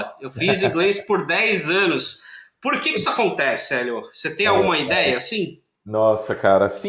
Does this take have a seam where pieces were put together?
no; 0 cuts

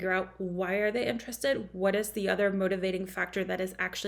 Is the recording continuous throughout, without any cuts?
yes; 0 cuts

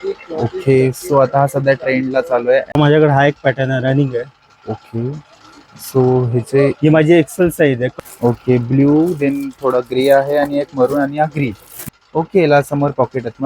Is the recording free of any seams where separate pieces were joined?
no; 3 cuts; at 2.7 s, 7.9 s, 11.7 s

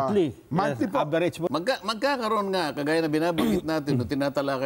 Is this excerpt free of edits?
no; 1 cut; at 1.5 s

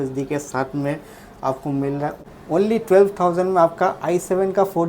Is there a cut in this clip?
yes; 1 cut; at 2.2 s

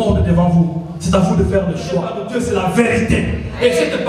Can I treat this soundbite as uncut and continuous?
no; 1 cut; at 2.2 s

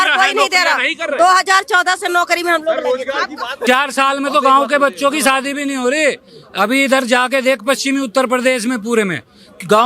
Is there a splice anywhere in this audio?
yes; 1 cut; at 3.6 s

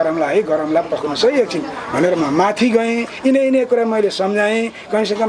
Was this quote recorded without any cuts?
yes; 0 cuts

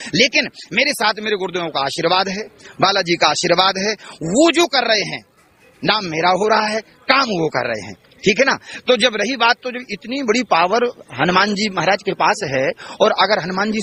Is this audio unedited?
yes; 0 cuts

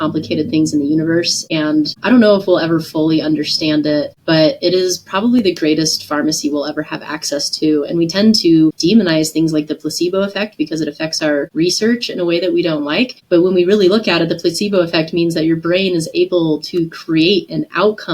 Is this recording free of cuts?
no; 5 cuts; at 1.7 s, 4.1 s, 8.8 s, 11.5 s, 13.2 s

